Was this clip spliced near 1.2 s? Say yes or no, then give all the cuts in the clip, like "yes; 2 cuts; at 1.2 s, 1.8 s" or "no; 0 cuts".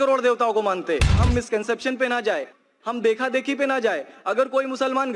yes; 1 cut; at 1.2 s